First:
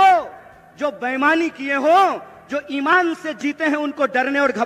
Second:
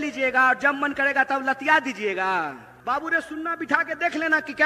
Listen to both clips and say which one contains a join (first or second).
second